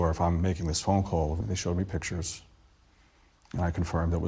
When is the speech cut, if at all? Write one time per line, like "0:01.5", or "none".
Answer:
0:01.5